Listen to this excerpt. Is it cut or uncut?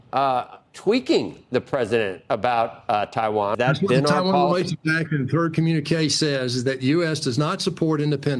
cut